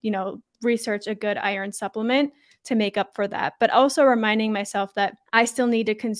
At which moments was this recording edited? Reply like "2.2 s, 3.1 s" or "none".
5.2 s